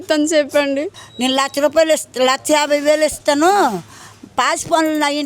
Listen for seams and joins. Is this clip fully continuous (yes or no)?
no